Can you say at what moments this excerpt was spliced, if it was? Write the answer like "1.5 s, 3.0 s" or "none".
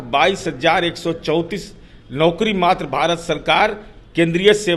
none

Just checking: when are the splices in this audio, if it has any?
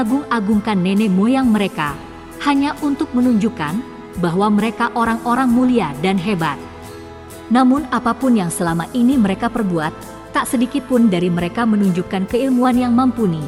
none

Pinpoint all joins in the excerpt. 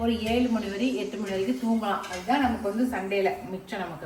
none

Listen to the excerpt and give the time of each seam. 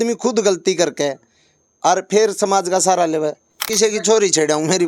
3.7 s

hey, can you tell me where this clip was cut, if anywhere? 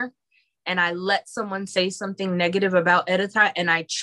none

